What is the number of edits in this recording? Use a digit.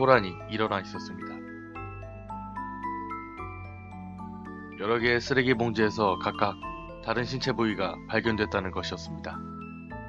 1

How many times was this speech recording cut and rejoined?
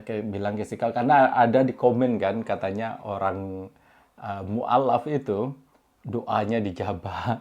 0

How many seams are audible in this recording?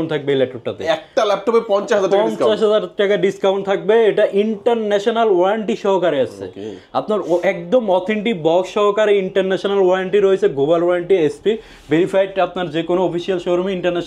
0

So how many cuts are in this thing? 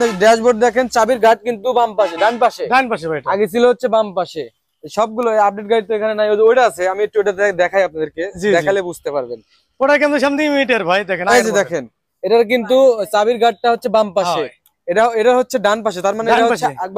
0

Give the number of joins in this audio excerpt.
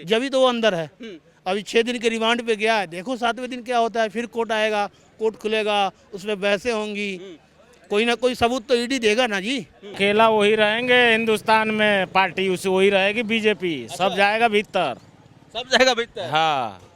1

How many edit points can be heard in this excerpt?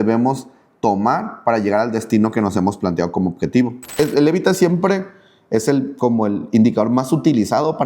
1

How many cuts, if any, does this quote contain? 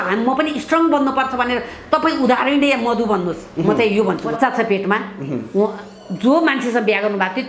1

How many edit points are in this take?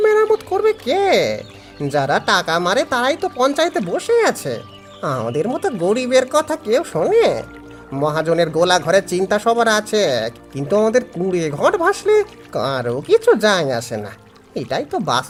0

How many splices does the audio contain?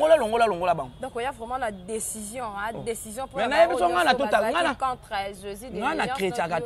0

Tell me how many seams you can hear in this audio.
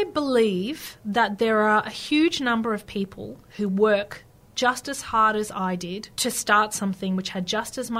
1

